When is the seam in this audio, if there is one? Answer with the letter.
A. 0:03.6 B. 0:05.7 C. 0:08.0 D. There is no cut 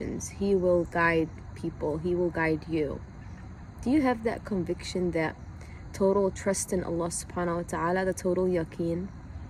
D